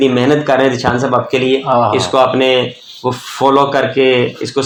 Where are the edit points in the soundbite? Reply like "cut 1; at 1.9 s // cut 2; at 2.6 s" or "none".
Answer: none

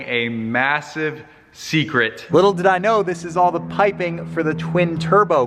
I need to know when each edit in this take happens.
cut 1; at 2.3 s

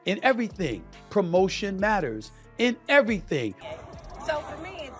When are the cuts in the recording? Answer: cut 1; at 3.6 s

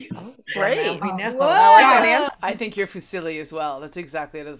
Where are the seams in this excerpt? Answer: cut 1; at 2.3 s

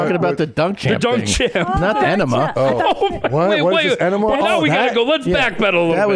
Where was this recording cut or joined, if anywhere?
cut 1; at 2.0 s

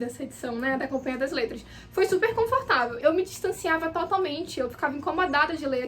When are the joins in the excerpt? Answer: cut 1; at 2.9 s

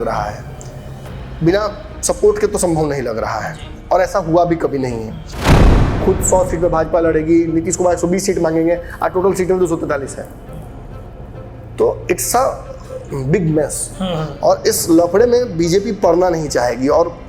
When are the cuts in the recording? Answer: cut 1; at 5.6 s

